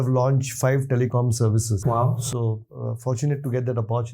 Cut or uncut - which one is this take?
uncut